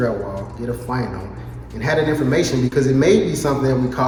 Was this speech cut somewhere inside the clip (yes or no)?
no